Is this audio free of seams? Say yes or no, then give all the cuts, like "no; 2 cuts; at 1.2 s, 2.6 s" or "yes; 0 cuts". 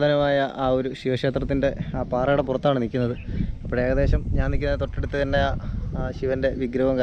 yes; 0 cuts